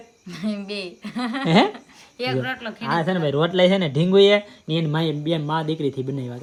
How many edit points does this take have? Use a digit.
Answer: 0